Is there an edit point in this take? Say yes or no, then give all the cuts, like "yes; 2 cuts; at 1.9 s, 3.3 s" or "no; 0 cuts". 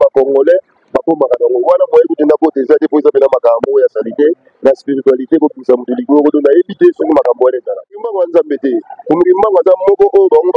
yes; 1 cut; at 7.9 s